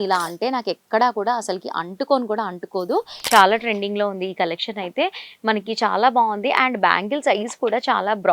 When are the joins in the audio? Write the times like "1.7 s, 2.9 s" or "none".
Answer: 3.2 s